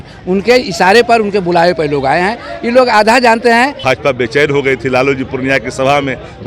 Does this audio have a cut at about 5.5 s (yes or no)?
no